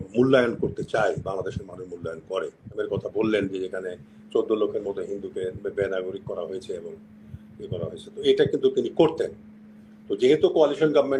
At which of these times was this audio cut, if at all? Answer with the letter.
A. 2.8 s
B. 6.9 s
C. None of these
A